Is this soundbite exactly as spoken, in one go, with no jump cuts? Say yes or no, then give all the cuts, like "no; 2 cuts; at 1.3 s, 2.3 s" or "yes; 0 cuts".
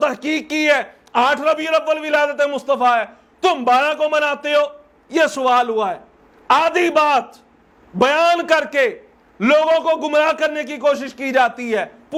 yes; 0 cuts